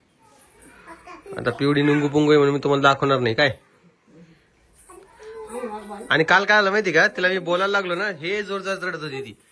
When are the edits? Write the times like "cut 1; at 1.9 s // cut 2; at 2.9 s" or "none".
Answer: none